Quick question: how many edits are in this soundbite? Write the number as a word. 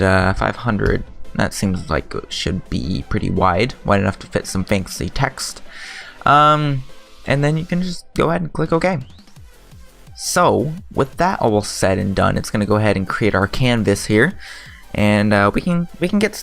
one